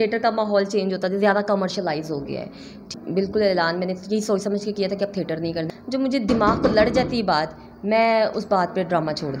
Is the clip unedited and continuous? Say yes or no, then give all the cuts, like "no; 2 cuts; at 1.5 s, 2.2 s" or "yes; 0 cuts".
no; 2 cuts; at 2.9 s, 5.7 s